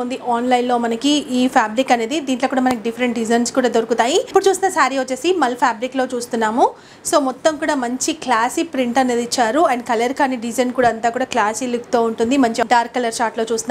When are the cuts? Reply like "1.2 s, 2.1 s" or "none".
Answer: 4.3 s, 12.7 s